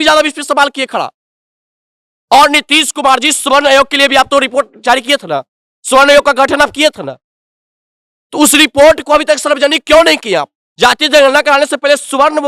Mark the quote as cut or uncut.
cut